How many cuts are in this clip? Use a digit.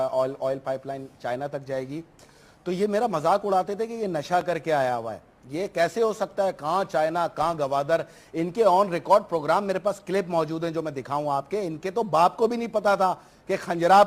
1